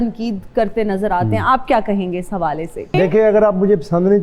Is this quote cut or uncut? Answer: cut